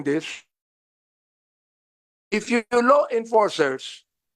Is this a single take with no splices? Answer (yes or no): yes